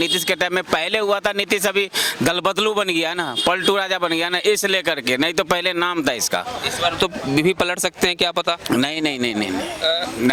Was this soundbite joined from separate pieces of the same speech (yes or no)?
no